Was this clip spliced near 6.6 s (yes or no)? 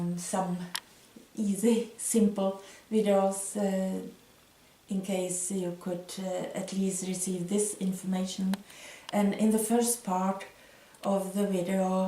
no